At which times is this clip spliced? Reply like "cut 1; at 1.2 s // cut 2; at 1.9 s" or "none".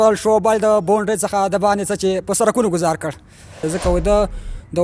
cut 1; at 3.6 s

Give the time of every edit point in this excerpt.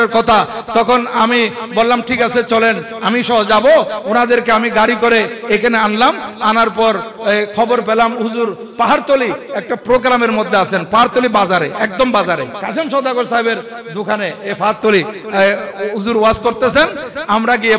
cut 1; at 2.9 s // cut 2; at 12.6 s

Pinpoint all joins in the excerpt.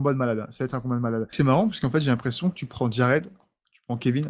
cut 1; at 1.3 s

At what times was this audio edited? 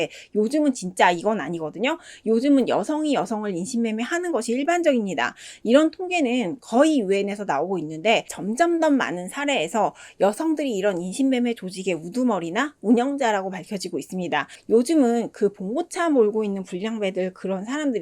cut 1; at 8.4 s // cut 2; at 14.5 s

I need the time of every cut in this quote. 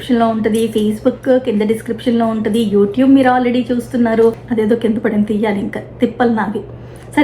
cut 1; at 4.4 s

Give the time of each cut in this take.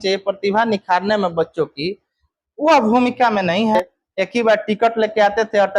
cut 1; at 3.8 s

